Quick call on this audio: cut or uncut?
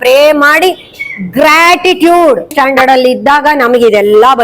cut